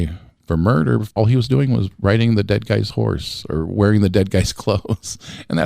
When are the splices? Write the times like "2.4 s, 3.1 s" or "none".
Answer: 1.1 s